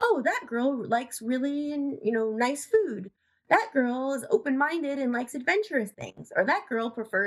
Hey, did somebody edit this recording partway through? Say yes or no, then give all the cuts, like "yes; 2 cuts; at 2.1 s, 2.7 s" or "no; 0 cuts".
no; 0 cuts